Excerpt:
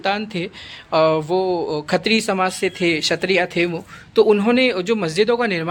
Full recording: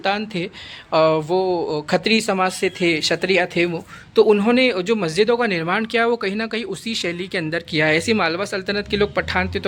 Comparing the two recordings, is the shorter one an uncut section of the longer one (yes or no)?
yes